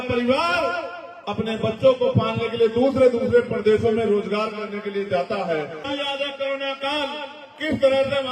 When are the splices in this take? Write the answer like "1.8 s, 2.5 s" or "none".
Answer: 5.9 s